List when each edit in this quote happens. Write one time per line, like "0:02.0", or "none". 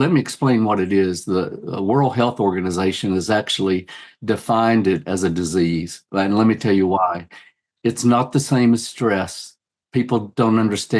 none